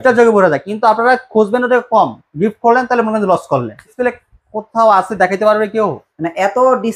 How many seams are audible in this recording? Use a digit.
1